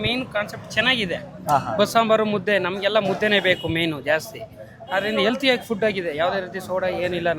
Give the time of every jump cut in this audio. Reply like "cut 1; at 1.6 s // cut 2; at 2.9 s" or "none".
none